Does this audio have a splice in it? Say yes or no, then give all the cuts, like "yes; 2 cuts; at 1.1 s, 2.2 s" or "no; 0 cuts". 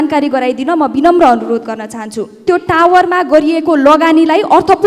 yes; 1 cut; at 2.4 s